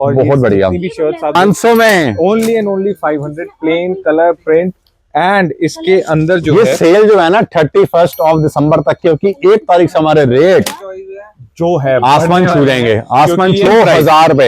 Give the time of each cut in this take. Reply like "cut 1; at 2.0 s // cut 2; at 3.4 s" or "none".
cut 1; at 1.4 s // cut 2; at 13.7 s